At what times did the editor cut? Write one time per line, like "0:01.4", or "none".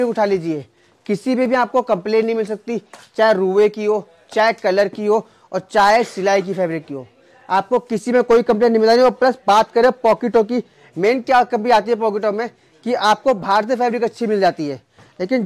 none